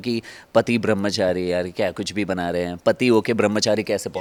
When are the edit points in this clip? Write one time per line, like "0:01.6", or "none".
none

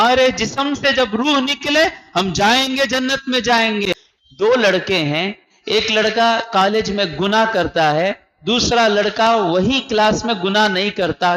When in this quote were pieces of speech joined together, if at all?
0:04.1

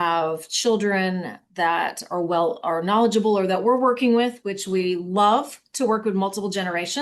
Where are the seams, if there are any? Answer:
none

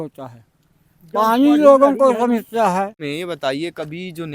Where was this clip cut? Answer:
0:03.1

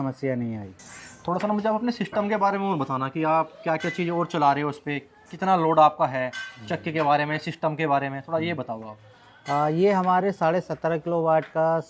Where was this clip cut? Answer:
none

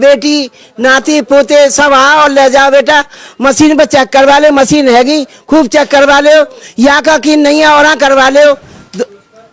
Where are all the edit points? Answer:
none

